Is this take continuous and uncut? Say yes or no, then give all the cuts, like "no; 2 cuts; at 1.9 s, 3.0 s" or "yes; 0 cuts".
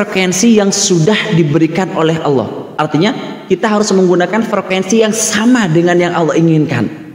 yes; 0 cuts